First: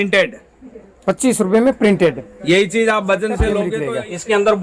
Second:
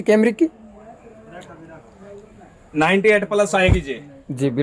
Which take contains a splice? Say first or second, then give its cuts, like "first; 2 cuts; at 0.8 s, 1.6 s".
first; 1 cut; at 3.6 s